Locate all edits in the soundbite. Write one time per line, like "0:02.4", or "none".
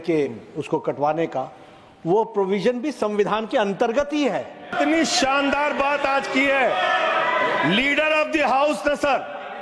0:04.7